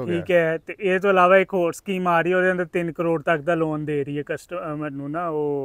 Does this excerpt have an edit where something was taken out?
no; 0 cuts

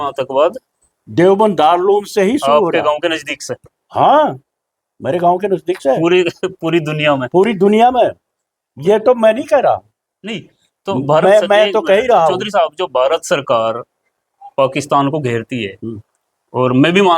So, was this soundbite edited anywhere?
no; 0 cuts

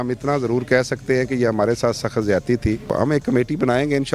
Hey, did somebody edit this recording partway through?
yes; 1 cut; at 2.9 s

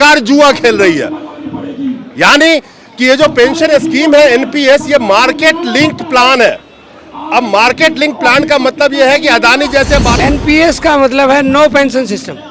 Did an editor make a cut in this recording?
yes; 1 cut; at 10.1 s

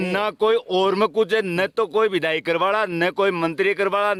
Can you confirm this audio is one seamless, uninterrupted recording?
yes; 0 cuts

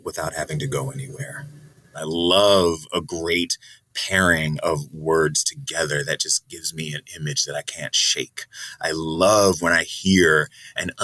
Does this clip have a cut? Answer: yes; 1 cut; at 1.9 s

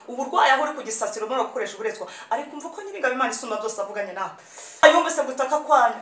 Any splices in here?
yes; 1 cut; at 4.8 s

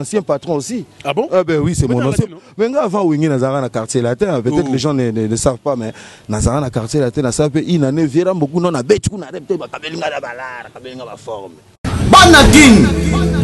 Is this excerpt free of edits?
no; 1 cut; at 11.8 s

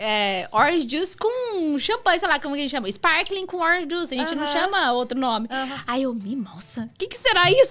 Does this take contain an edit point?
no; 0 cuts

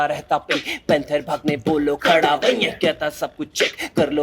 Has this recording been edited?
no; 0 cuts

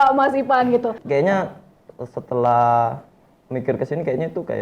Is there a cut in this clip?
yes; 1 cut; at 1.0 s

